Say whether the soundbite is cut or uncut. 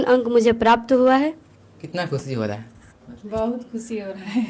cut